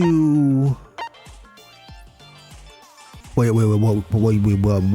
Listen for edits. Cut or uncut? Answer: cut